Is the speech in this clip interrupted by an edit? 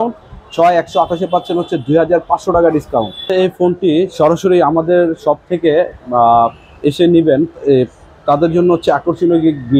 yes; 1 cut; at 3.2 s

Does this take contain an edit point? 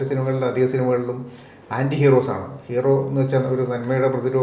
no; 0 cuts

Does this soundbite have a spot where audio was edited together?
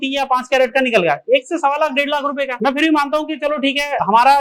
no; 0 cuts

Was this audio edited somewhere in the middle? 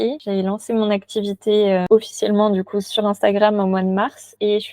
yes; 2 cuts; at 1.8 s, 2.9 s

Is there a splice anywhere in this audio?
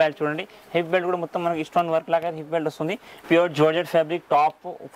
yes; 1 cut; at 3.2 s

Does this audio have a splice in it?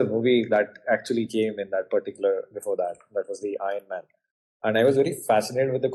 no; 0 cuts

